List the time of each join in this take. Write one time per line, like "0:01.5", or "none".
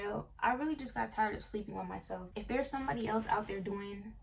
0:02.3